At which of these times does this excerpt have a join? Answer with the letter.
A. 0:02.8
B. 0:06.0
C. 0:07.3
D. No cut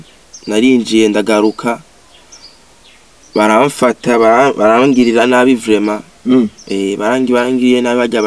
D